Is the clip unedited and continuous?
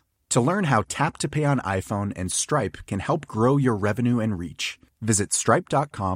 yes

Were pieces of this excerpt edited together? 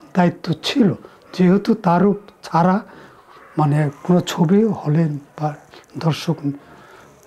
no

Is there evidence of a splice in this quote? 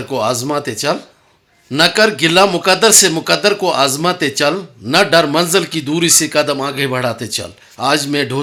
no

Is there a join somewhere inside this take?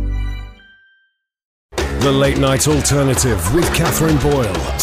yes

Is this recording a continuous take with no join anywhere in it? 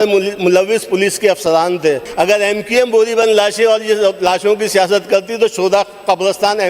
no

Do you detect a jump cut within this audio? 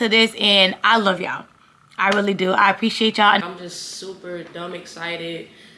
yes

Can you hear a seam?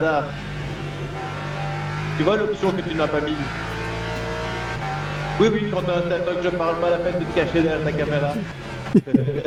no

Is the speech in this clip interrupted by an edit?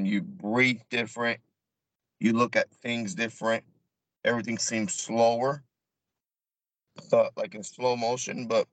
no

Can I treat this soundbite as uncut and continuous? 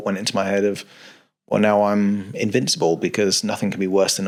yes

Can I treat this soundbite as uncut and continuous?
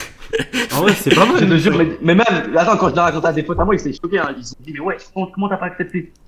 yes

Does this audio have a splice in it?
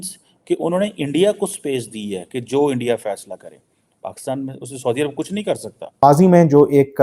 yes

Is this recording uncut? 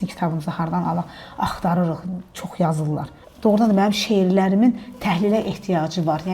no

